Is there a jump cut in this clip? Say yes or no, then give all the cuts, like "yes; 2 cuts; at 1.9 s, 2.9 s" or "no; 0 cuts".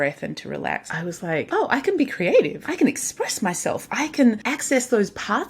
yes; 3 cuts; at 1.1 s, 2.6 s, 4.5 s